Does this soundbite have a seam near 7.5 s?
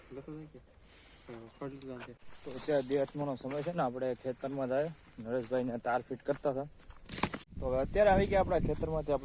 yes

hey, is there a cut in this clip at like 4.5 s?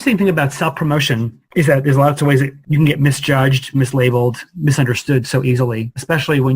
no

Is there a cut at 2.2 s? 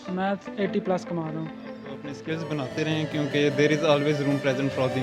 yes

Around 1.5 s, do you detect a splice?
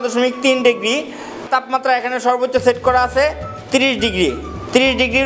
yes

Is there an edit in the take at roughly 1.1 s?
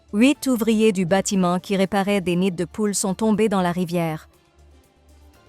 no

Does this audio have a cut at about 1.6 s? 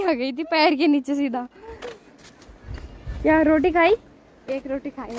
no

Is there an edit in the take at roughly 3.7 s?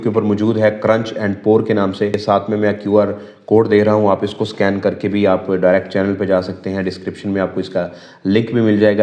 no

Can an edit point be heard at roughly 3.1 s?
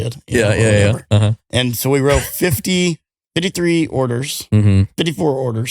yes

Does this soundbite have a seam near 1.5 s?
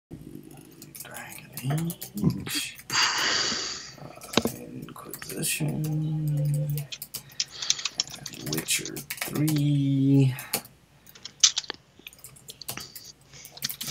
no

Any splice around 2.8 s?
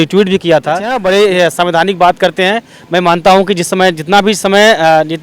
no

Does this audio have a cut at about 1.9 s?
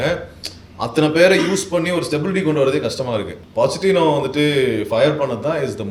no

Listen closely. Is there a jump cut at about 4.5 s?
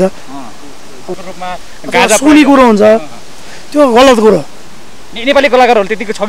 no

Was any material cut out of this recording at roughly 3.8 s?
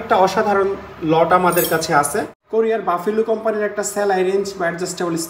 no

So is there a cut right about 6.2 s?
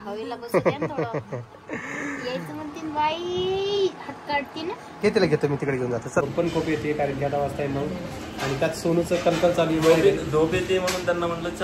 yes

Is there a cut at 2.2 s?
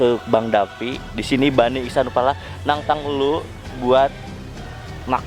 no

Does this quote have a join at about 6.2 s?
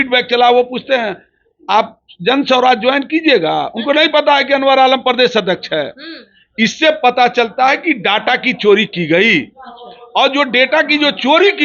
no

